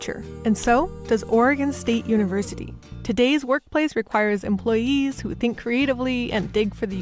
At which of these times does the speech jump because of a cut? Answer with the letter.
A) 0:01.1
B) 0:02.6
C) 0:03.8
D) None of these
D